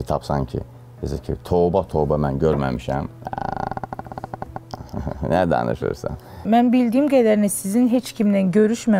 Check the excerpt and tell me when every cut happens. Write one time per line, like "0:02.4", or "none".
0:06.4